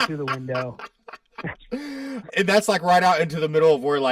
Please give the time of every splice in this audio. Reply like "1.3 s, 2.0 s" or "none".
2.2 s

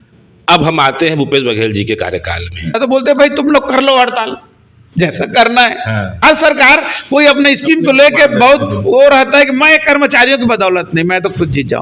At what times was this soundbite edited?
2.8 s, 6.1 s

